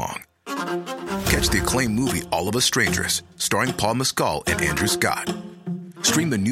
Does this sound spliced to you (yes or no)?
no